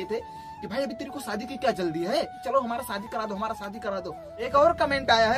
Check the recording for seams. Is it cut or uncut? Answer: cut